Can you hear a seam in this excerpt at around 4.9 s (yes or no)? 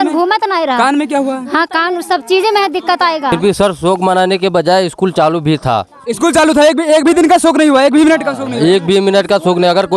no